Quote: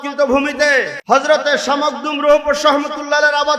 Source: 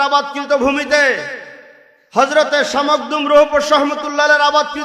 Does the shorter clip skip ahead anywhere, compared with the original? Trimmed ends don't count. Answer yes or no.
yes